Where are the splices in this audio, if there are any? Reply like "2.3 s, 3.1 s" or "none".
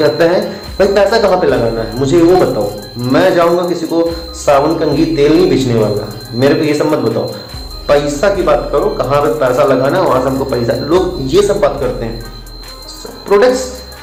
none